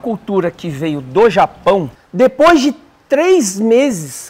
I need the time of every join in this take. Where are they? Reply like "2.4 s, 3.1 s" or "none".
2.0 s